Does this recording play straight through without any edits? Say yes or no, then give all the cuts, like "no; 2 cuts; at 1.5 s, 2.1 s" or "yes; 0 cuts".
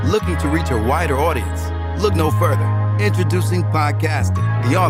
yes; 0 cuts